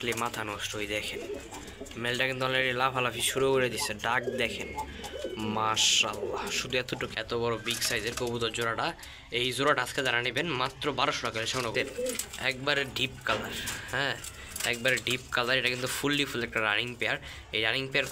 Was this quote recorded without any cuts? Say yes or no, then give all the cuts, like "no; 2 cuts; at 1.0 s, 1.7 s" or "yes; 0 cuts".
no; 2 cuts; at 7.1 s, 11.7 s